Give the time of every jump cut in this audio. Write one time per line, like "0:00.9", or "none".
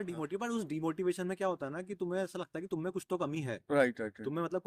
none